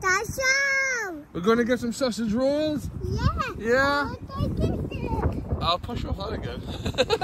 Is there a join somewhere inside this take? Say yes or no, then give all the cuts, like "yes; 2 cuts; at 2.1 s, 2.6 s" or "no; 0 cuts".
no; 0 cuts